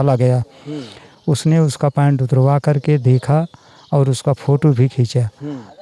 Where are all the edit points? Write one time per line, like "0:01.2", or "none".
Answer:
none